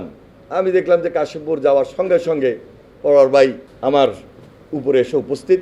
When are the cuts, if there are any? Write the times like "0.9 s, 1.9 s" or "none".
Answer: 3.7 s